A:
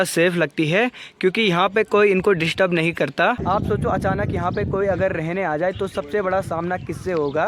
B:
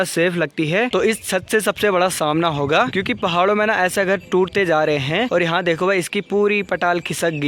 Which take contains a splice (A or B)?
B